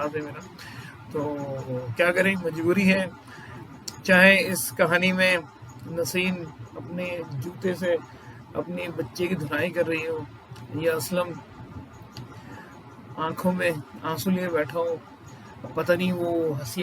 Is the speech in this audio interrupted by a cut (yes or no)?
yes